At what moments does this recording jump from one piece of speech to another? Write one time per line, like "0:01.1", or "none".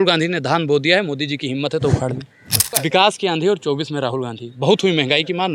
0:02.8